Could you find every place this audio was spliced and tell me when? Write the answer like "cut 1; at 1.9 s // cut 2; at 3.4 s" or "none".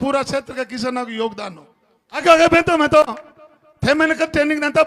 cut 1; at 2.2 s